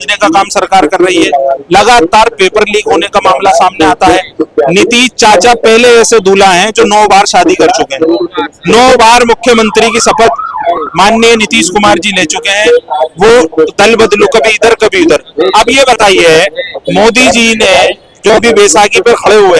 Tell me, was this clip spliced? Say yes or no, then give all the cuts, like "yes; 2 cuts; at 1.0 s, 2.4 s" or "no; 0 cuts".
no; 0 cuts